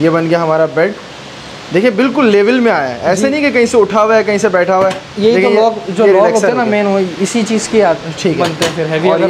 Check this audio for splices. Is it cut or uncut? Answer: uncut